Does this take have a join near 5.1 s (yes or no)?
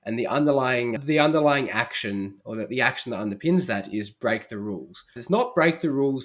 yes